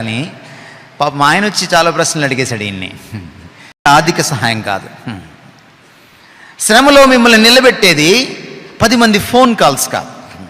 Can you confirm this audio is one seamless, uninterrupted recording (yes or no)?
no